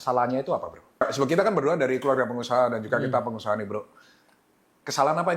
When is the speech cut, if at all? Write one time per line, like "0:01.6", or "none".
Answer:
0:01.0